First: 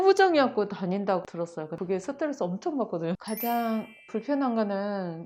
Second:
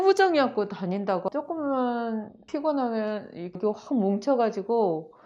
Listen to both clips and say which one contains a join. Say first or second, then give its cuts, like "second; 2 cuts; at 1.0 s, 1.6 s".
second; 1 cut; at 1.3 s